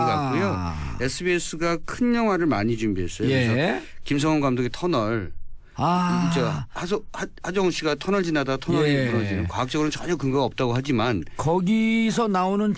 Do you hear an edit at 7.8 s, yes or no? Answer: no